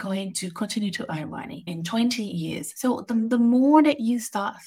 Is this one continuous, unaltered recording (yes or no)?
no